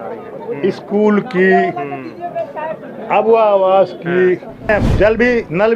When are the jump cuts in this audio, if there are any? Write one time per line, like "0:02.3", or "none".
0:04.7